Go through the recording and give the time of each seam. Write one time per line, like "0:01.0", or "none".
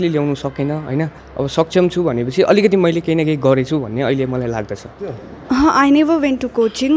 0:05.1